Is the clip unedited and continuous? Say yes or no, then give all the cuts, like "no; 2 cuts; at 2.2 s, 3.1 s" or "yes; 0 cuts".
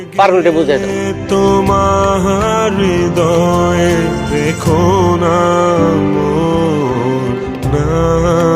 yes; 0 cuts